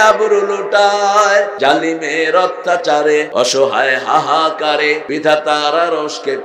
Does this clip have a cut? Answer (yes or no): yes